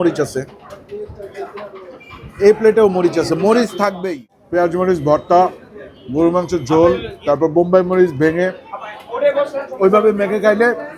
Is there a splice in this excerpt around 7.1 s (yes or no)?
yes